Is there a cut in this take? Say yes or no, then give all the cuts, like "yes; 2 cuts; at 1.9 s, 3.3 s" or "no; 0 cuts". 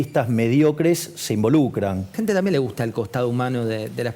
yes; 1 cut; at 2.1 s